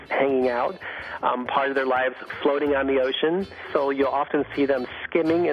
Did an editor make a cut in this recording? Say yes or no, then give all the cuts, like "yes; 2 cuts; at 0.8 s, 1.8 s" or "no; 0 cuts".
yes; 1 cut; at 3.6 s